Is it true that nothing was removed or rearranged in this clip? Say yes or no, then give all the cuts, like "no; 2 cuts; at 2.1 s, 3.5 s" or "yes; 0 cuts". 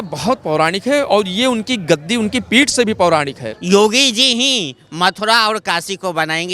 no; 1 cut; at 3.5 s